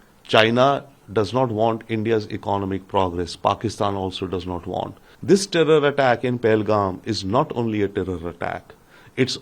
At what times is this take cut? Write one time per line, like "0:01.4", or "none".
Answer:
0:05.1